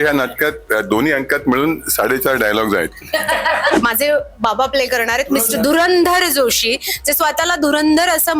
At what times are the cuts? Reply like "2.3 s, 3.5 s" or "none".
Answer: 3.8 s